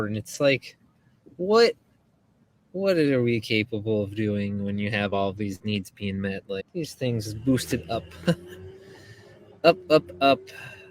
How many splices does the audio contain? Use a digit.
1